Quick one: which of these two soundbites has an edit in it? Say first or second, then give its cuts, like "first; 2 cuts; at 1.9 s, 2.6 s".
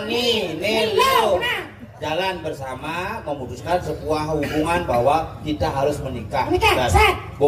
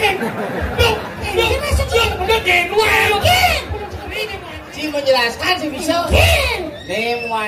second; 1 cut; at 4.2 s